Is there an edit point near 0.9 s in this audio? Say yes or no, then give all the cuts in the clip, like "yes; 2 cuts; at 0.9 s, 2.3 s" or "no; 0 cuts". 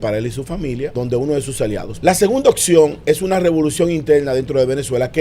yes; 2 cuts; at 0.9 s, 1.9 s